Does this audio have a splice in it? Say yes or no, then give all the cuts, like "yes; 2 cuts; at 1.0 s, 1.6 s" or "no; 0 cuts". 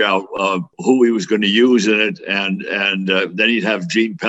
no; 0 cuts